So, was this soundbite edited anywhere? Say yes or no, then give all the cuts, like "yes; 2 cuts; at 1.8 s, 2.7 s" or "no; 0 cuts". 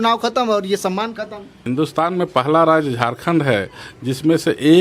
yes; 1 cut; at 1.5 s